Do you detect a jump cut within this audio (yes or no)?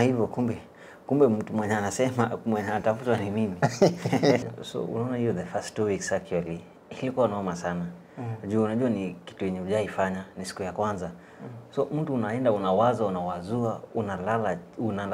yes